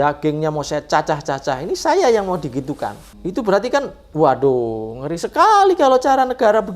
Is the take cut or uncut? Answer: cut